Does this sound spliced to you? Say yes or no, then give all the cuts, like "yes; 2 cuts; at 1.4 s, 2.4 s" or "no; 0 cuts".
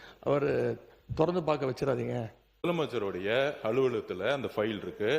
yes; 1 cut; at 2.7 s